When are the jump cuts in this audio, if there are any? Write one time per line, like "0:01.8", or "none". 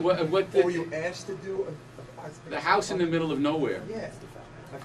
0:01.3